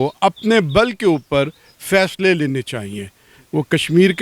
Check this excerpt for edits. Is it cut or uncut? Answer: uncut